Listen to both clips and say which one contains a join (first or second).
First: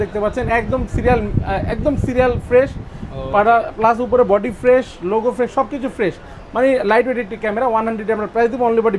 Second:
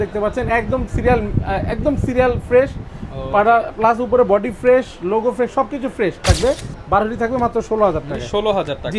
second